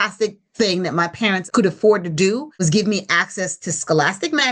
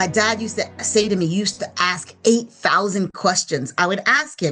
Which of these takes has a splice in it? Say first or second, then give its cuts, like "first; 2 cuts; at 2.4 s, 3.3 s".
first; 2 cuts; at 1.4 s, 2.6 s